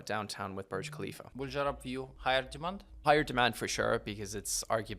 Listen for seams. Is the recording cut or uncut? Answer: cut